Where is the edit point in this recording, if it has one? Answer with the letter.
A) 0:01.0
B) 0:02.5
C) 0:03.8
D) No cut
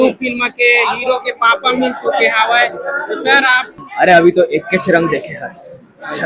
C